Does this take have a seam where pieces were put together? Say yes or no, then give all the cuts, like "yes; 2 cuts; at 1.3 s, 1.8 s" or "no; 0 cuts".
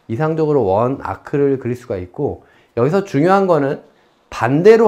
no; 0 cuts